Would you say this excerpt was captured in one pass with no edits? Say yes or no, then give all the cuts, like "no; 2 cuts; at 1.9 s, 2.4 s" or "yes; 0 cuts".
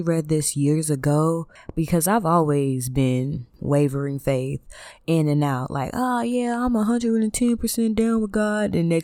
no; 2 cuts; at 1.6 s, 3.5 s